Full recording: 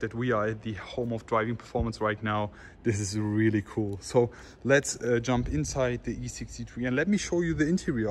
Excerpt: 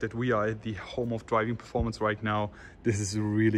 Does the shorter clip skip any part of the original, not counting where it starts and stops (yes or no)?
no